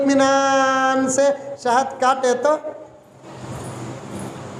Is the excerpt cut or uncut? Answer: uncut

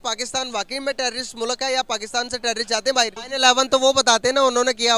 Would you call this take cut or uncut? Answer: cut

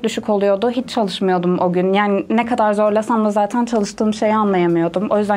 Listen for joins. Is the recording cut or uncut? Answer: uncut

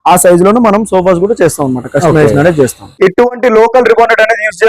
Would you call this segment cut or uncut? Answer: cut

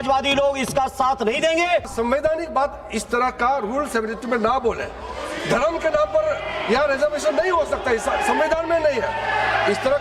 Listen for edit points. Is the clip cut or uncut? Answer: cut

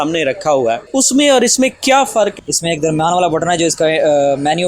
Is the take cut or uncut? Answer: cut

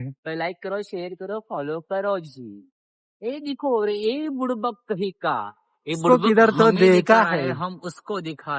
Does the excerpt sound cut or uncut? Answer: uncut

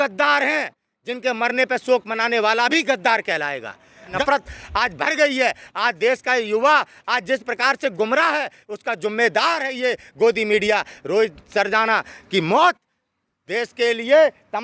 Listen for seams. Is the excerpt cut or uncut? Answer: cut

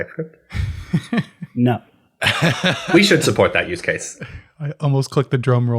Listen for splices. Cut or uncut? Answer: uncut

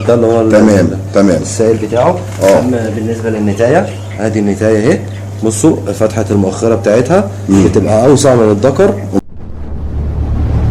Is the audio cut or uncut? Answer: cut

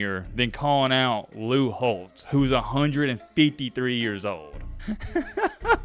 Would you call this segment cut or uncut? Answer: cut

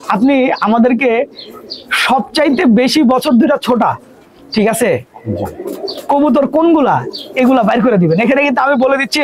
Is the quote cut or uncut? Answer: uncut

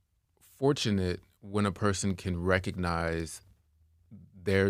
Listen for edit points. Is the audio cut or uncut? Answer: uncut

